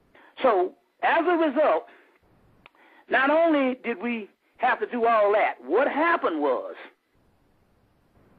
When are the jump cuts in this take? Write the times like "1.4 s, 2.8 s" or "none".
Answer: 4.0 s